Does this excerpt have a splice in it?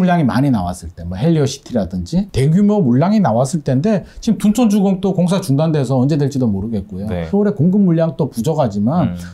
yes; 1 cut; at 7.2 s

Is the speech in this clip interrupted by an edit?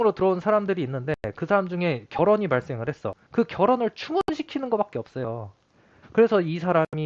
no; 0 cuts

